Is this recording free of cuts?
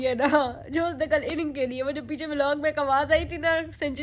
yes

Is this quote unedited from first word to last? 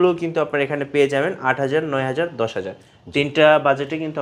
yes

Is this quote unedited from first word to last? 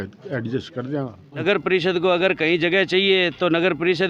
no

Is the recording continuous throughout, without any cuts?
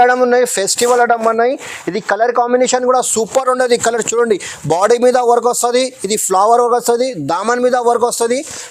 yes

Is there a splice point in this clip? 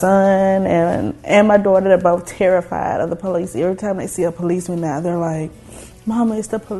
no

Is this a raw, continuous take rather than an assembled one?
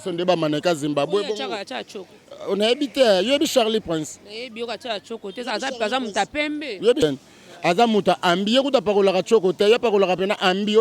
no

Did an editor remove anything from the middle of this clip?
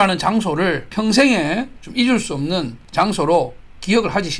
yes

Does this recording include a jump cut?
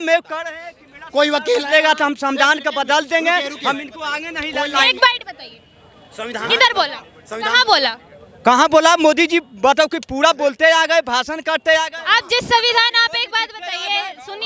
no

